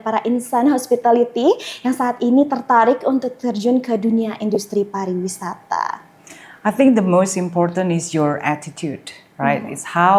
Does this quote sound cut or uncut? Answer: uncut